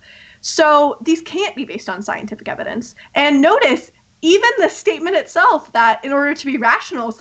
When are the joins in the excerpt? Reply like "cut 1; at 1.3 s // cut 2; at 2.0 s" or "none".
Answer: none